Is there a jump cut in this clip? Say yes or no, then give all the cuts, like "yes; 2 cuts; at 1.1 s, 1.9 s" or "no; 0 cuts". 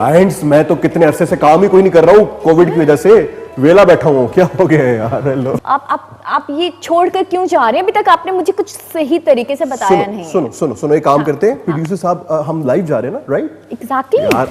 yes; 1 cut; at 5.5 s